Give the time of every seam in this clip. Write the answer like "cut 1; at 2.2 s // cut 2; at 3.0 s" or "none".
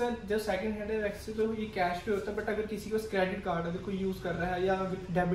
none